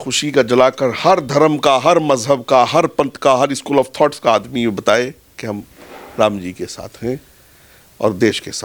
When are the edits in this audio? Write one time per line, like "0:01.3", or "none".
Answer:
none